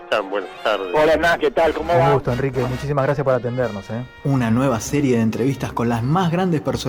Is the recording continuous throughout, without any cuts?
yes; 0 cuts

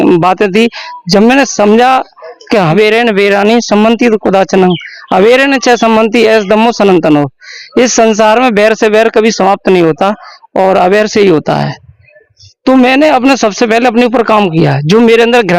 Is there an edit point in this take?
yes; 1 cut; at 2.7 s

